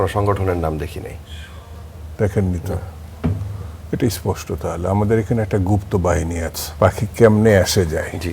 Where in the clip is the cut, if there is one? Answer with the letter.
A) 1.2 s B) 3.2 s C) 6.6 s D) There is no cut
C